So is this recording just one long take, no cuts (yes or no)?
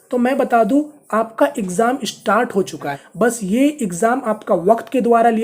no